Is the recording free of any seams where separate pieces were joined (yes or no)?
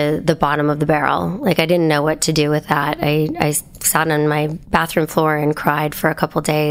no